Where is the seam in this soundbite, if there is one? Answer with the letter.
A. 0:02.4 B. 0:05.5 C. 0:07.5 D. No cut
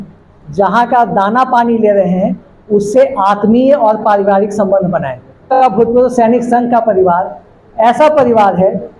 B